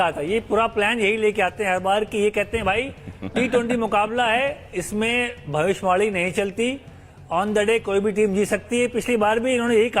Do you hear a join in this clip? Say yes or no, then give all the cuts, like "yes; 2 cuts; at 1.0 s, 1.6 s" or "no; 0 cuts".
no; 0 cuts